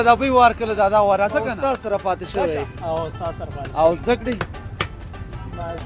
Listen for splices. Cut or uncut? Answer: cut